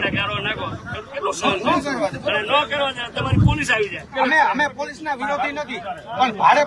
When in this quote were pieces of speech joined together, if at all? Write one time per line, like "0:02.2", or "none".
0:04.0